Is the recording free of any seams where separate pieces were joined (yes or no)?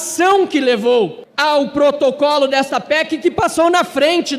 no